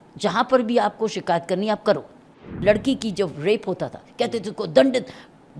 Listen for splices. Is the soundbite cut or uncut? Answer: cut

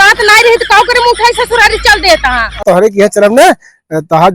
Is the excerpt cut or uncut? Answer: cut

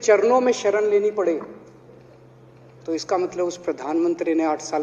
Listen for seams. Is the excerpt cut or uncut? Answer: uncut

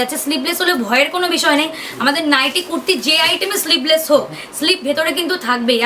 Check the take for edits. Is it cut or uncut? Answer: uncut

